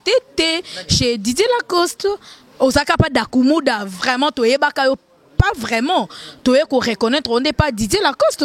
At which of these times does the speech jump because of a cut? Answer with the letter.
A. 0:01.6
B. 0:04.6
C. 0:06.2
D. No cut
D